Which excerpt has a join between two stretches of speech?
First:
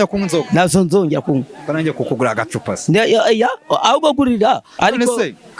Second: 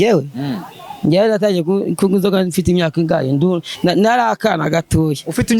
first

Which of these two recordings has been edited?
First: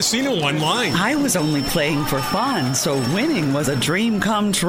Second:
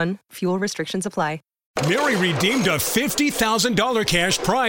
second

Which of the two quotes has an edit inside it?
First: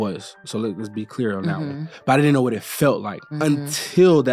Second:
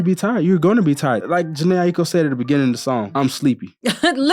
second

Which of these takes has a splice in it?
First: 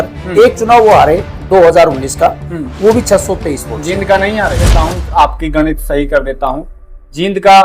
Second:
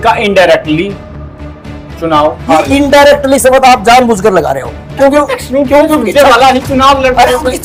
first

